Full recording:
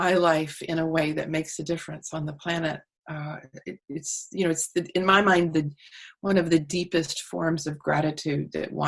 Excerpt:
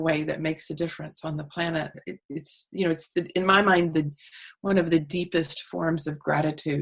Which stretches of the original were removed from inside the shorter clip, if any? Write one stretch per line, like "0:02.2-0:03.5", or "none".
0:02.9-0:03.6